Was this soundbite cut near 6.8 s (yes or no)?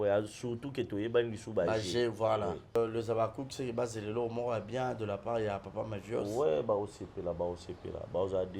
no